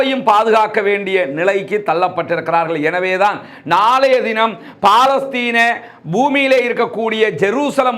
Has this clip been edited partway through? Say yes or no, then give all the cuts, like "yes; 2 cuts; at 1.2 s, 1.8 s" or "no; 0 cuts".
no; 0 cuts